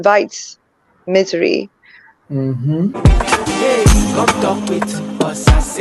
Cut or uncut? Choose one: cut